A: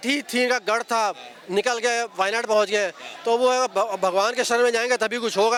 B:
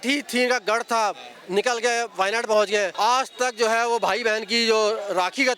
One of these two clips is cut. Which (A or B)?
B